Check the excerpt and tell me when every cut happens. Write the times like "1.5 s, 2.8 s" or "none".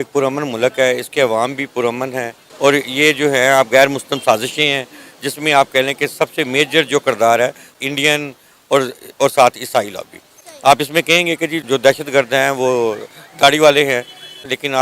2.3 s, 7.6 s